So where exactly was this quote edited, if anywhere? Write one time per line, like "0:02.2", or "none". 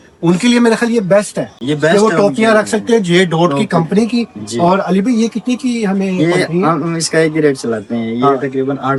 none